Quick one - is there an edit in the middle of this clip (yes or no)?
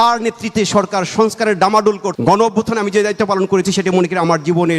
yes